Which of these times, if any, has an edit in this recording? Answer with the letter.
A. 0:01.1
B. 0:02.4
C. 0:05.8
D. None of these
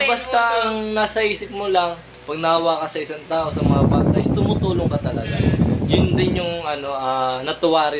D